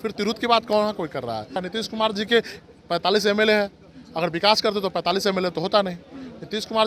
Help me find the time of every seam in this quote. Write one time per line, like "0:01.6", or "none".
0:01.6

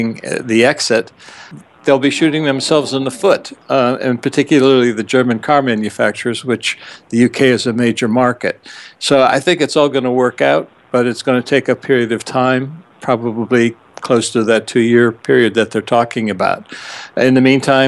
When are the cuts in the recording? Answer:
0:04.5

